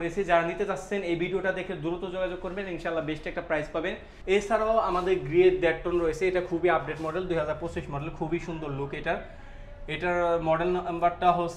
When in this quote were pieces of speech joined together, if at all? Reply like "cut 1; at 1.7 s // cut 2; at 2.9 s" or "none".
cut 1; at 4.1 s